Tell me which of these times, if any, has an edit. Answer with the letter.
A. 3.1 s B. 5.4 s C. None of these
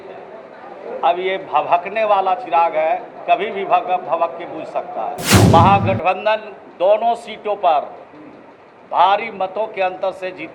B